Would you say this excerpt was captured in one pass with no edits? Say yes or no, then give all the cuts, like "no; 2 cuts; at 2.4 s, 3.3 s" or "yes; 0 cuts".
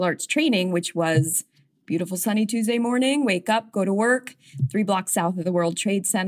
yes; 0 cuts